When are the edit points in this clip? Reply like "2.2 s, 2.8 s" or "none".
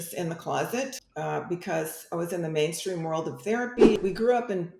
1.0 s, 4.0 s